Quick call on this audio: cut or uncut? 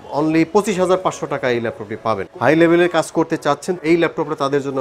cut